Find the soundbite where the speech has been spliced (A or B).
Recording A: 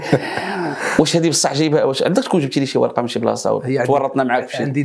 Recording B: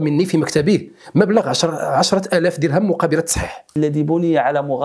B